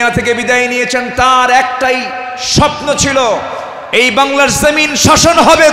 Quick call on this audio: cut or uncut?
uncut